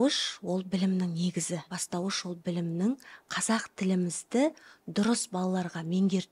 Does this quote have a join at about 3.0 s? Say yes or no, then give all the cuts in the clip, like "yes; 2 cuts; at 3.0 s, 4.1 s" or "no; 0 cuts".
no; 1 cut; at 1.8 s